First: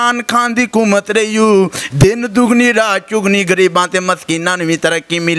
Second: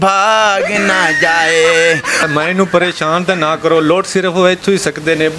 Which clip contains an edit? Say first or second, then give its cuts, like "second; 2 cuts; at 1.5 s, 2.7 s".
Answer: second; 1 cut; at 2.2 s